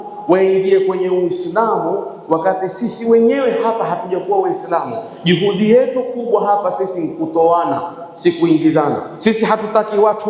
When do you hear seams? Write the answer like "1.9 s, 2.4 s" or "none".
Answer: 9.1 s